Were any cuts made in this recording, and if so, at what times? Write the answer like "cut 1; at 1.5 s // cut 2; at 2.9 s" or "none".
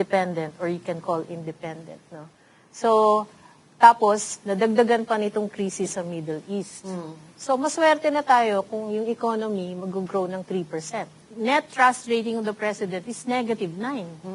cut 1; at 11.2 s